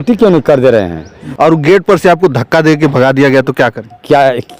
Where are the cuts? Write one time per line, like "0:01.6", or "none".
0:01.3